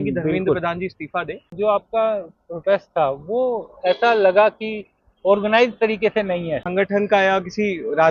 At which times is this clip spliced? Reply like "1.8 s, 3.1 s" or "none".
1.5 s, 6.6 s